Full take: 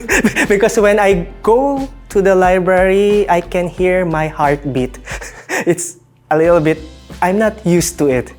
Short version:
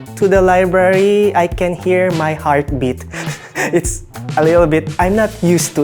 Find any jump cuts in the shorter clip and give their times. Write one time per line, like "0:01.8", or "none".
0:04.9